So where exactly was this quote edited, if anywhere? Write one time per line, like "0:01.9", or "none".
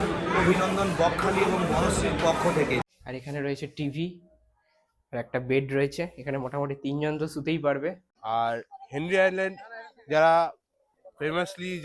0:02.8
0:08.1